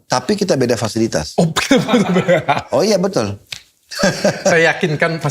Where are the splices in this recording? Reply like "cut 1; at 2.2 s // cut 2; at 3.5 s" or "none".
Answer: none